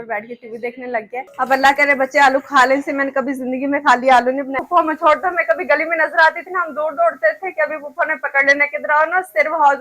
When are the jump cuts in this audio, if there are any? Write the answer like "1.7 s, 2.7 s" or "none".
1.3 s, 4.6 s